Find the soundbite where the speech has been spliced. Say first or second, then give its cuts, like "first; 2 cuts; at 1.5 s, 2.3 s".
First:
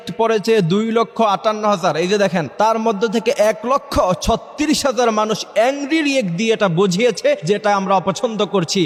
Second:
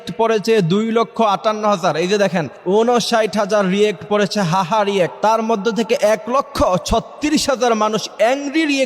second; 2 cuts; at 2.5 s, 5.1 s